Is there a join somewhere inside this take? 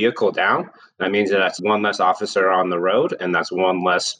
yes; 1 cut; at 1.6 s

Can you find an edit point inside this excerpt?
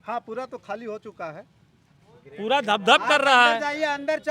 no; 0 cuts

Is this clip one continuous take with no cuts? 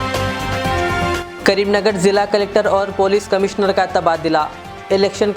yes; 0 cuts

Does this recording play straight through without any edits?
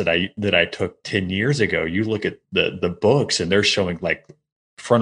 yes; 0 cuts

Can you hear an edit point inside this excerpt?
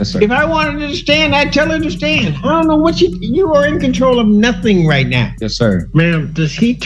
yes; 1 cut; at 5.7 s

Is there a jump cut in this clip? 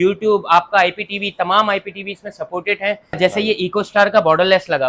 yes; 1 cut; at 3.2 s

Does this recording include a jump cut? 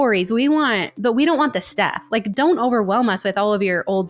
no; 0 cuts

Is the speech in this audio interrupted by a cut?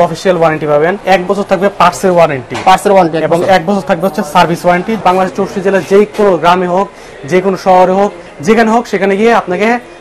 yes; 2 cuts; at 1.0 s, 5.0 s

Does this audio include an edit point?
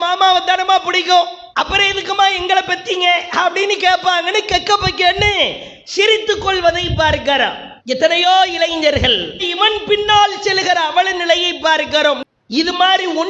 yes; 1 cut; at 12.2 s

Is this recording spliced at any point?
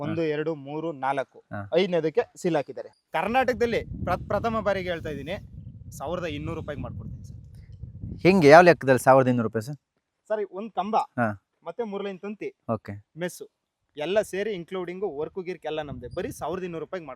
yes; 1 cut; at 2.8 s

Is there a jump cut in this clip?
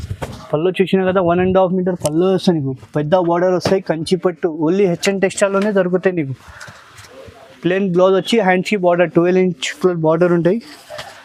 no; 0 cuts

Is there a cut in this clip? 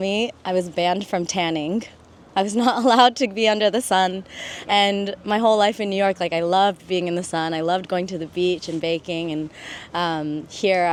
no; 0 cuts

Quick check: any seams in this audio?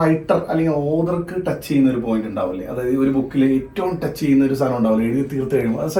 no; 0 cuts

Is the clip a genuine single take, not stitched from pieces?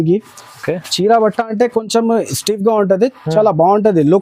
yes; 0 cuts

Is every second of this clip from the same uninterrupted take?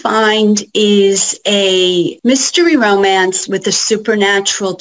no; 1 cut; at 2.1 s

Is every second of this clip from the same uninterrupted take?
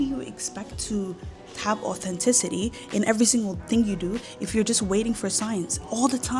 yes; 0 cuts

